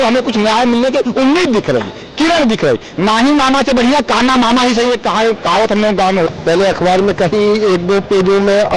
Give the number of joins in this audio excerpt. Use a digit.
1